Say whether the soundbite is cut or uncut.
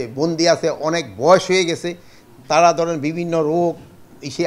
uncut